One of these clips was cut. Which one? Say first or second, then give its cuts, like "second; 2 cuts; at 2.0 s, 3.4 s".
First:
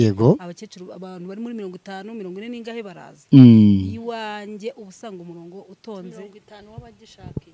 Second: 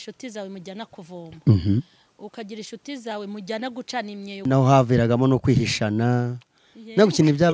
second; 1 cut; at 4.4 s